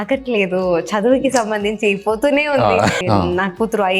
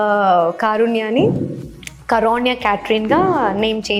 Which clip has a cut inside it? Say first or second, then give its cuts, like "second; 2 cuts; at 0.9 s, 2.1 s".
first; 1 cut; at 3.0 s